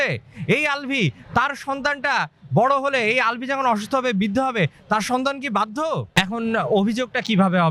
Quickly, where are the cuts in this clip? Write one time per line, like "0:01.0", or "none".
0:06.1